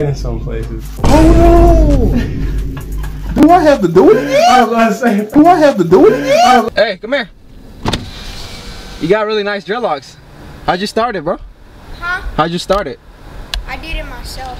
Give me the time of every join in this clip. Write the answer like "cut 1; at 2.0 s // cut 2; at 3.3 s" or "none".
cut 1; at 6.6 s